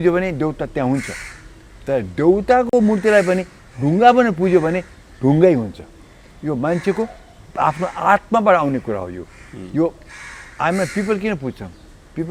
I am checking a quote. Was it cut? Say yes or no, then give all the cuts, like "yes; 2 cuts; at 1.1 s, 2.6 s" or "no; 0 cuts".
no; 0 cuts